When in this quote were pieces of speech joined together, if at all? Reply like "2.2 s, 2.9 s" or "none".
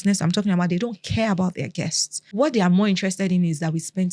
2.2 s